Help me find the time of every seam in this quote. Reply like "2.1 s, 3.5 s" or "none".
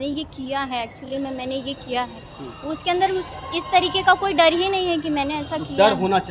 none